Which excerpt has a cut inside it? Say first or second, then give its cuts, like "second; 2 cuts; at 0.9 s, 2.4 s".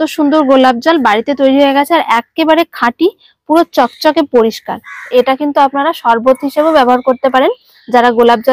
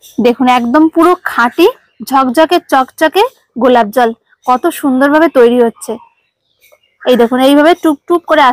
first; 1 cut; at 5.1 s